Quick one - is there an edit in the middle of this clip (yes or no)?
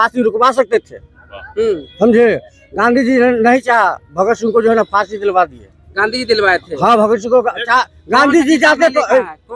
no